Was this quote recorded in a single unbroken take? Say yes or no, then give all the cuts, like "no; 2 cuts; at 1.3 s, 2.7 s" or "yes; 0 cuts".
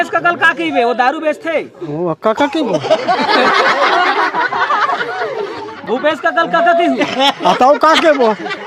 yes; 0 cuts